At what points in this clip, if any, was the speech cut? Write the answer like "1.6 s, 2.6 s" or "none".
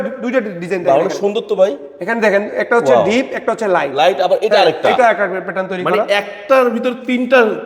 none